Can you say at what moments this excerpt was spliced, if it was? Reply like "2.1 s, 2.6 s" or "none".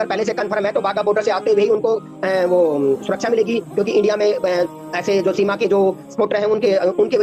none